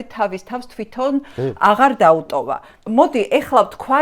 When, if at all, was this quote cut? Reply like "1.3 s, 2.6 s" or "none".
none

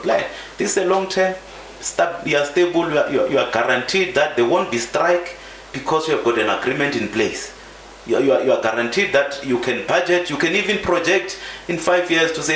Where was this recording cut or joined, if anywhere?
none

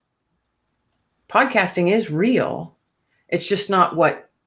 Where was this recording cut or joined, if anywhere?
none

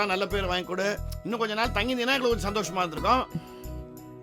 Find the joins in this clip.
none

